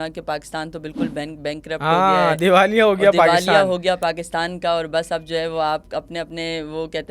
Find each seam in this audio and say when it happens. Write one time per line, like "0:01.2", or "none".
none